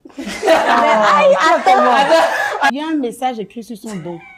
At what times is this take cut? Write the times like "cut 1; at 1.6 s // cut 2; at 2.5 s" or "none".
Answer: cut 1; at 2.7 s